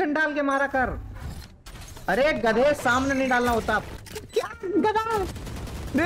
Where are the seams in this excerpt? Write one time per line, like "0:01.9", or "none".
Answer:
0:03.9